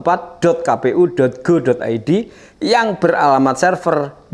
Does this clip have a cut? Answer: no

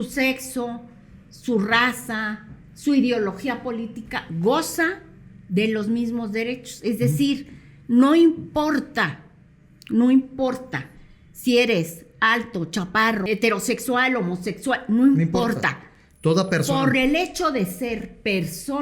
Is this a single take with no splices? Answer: yes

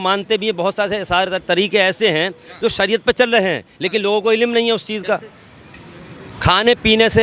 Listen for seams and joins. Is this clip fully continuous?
yes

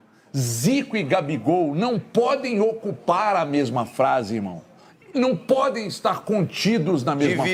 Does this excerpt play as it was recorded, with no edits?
yes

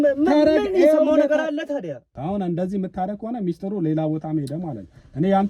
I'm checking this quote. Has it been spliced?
yes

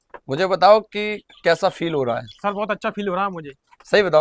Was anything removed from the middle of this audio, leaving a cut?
no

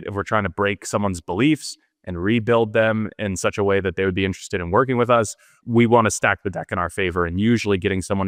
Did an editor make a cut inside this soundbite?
no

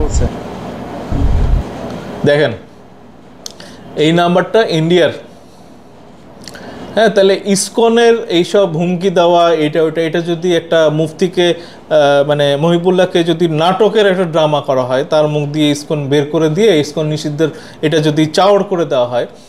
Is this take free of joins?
yes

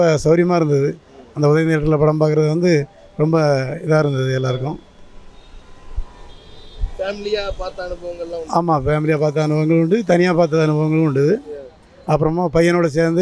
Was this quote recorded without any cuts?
yes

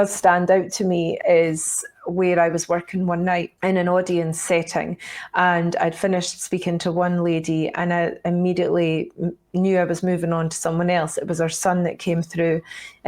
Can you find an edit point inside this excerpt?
yes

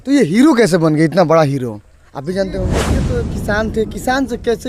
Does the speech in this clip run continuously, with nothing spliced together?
no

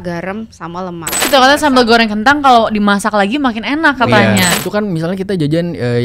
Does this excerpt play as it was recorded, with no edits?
no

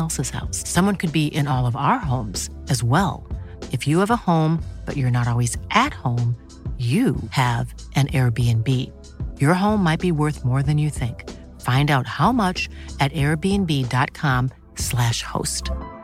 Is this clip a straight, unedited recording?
yes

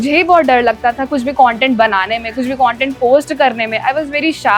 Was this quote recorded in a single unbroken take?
yes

